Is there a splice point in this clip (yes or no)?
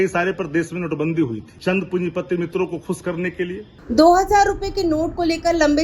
yes